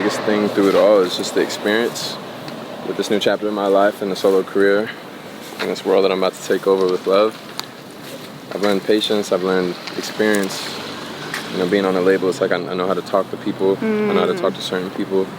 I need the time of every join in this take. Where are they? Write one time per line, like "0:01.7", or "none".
none